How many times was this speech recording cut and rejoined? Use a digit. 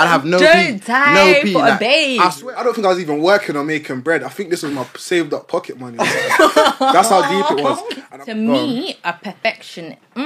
2